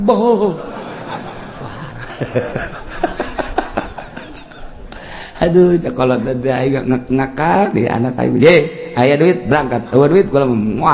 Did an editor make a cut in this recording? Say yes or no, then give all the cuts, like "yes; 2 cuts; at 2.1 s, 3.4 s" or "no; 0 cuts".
no; 0 cuts